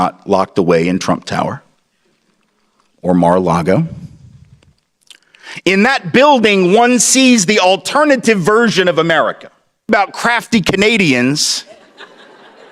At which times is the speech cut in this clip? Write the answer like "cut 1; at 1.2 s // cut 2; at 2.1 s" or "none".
cut 1; at 9.9 s